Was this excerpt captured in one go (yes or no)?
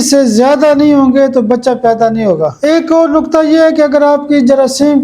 no